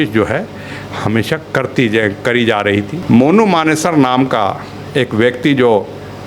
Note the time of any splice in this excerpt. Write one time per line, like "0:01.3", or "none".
0:02.9